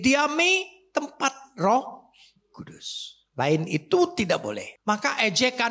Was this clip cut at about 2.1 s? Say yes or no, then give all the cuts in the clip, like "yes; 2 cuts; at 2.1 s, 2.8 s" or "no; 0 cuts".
no; 1 cut; at 4.7 s